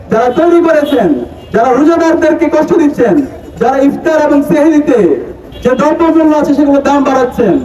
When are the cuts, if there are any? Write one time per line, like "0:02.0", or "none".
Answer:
none